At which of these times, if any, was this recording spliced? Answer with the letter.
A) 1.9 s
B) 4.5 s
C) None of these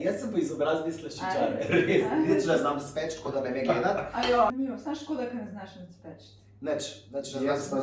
B